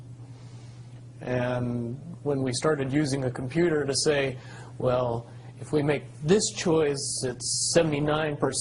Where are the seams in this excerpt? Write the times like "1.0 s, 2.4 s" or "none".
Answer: 7.1 s